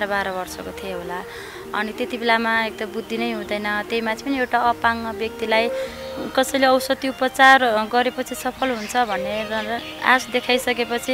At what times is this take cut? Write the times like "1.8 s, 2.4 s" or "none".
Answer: none